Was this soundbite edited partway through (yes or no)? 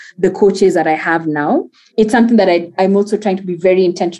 yes